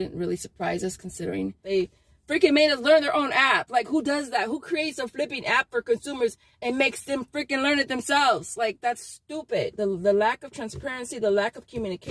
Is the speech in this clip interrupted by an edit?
yes; 2 cuts; at 1.6 s, 9.7 s

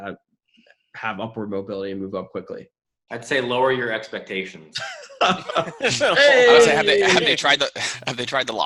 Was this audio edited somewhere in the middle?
no; 0 cuts

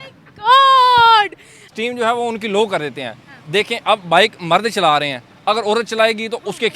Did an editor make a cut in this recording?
yes; 1 cut; at 1.6 s

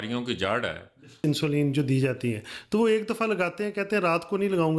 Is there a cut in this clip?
yes; 1 cut; at 1.2 s

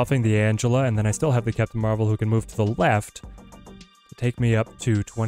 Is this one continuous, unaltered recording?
yes; 0 cuts

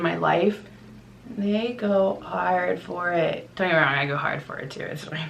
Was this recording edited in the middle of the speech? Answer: yes; 1 cut; at 3.5 s

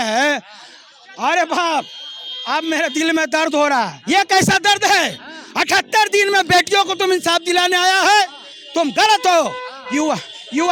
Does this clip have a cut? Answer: no; 0 cuts

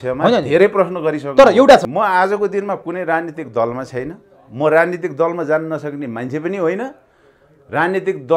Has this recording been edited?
yes; 1 cut; at 1.9 s

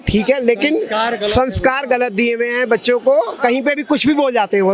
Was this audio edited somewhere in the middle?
no; 0 cuts

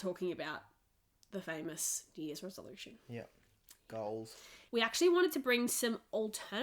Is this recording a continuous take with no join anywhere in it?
no; 1 cut; at 4.5 s

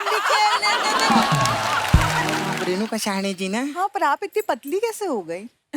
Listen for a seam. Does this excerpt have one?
yes; 1 cut; at 2.5 s

